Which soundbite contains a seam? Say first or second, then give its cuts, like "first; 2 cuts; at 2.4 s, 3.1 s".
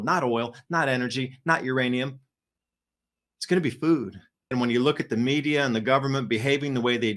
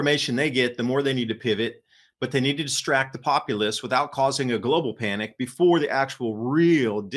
first; 1 cut; at 4.5 s